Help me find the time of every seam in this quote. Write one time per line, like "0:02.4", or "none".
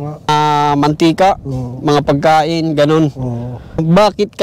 none